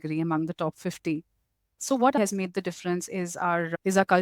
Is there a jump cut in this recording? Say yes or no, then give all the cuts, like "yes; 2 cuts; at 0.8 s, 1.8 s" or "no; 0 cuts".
yes; 1 cut; at 2.2 s